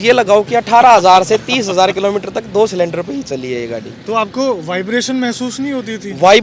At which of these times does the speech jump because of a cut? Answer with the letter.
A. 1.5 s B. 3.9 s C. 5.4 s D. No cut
D